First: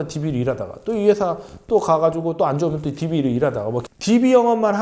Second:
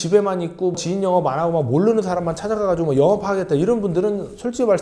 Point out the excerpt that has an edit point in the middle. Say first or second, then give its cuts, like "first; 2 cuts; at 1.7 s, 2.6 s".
first; 1 cut; at 3.8 s